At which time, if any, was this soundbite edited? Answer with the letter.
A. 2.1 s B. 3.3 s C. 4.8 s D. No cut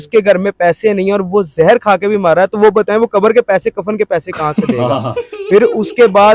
D